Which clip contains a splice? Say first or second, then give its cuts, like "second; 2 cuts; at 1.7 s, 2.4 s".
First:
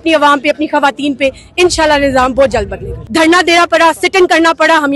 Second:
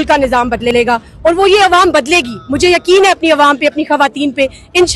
first; 1 cut; at 3.0 s